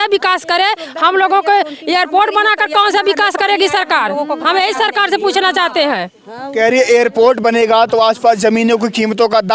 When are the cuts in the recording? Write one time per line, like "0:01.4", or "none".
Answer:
none